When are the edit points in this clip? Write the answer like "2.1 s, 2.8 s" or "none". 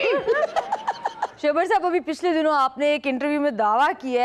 1.3 s